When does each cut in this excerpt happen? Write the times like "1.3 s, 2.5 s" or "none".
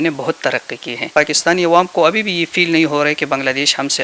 1.1 s